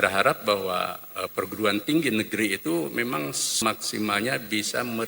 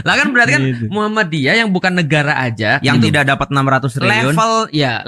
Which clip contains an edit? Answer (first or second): first